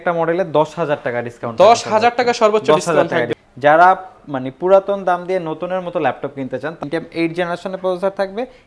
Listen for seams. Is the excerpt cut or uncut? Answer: cut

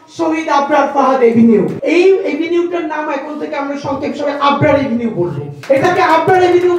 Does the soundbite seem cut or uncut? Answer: cut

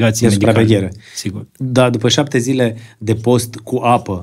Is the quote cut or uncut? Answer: uncut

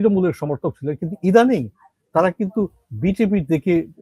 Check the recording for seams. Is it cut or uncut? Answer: uncut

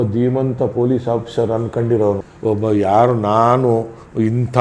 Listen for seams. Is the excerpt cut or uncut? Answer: uncut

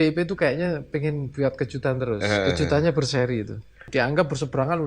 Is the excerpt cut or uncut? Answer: cut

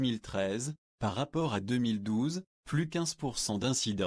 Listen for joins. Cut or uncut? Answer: cut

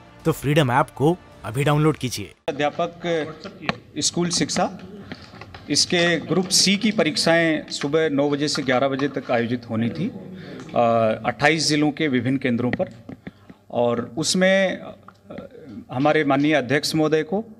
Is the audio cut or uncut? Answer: cut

